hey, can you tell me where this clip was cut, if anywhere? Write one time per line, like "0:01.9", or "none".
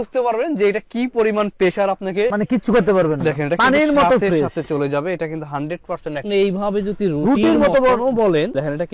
0:06.2